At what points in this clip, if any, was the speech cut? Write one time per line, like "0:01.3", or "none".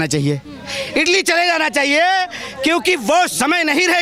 none